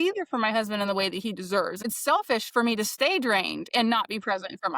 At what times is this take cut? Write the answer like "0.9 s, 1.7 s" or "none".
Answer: 1.8 s